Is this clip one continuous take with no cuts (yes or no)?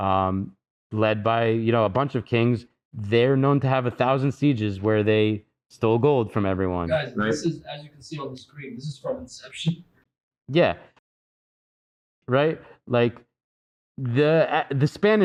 yes